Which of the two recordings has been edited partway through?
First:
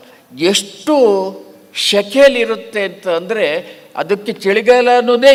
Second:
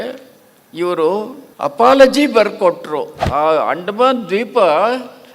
second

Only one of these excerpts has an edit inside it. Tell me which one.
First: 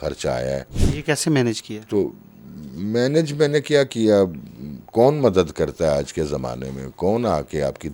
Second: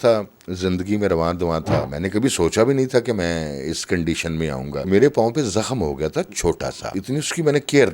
second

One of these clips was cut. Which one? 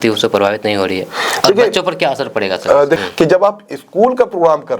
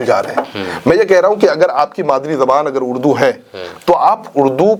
first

